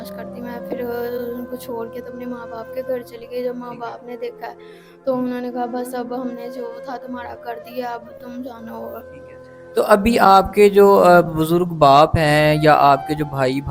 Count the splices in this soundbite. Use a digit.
1